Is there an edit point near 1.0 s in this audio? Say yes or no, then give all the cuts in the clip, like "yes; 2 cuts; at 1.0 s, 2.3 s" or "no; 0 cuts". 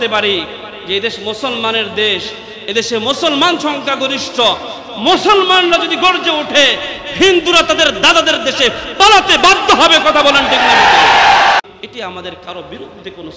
no; 1 cut; at 11.6 s